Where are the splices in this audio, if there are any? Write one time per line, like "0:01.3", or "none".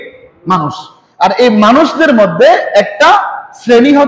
none